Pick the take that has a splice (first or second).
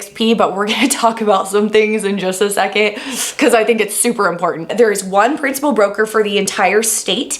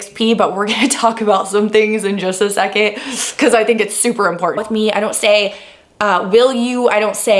second